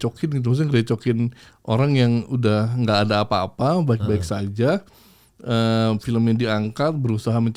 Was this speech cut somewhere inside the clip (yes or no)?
no